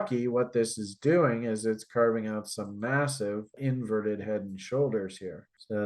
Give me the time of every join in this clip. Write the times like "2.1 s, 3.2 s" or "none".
3.5 s